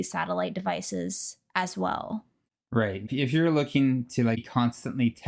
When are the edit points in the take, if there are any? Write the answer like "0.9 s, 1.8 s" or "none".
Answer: 3.1 s, 4.4 s